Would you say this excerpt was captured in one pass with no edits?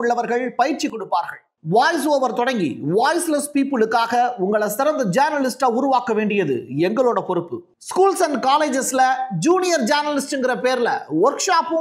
yes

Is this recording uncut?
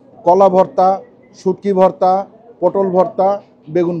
yes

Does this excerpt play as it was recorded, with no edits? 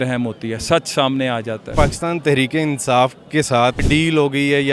no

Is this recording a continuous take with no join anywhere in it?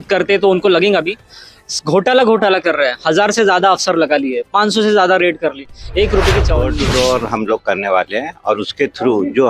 no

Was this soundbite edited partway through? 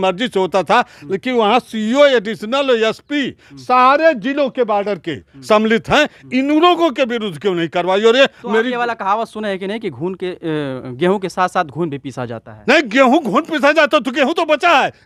no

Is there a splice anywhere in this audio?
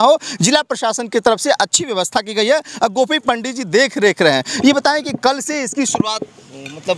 no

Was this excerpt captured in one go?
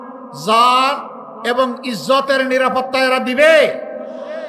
yes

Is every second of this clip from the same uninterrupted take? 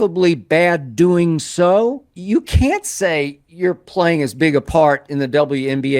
no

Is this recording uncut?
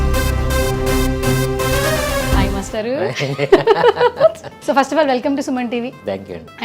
no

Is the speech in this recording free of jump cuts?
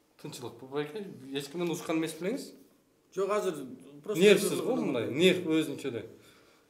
yes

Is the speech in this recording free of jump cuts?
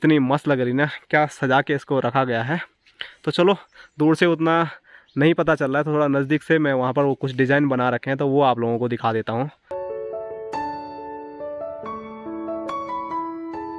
yes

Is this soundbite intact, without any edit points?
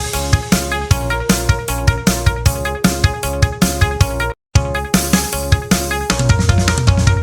no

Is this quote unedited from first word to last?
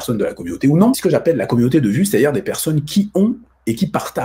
no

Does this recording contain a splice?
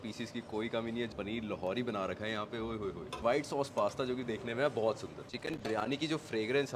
yes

